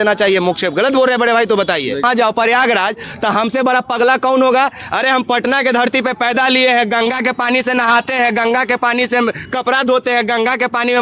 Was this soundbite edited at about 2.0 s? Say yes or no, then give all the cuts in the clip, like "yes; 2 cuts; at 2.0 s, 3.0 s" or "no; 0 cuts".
yes; 1 cut; at 2.0 s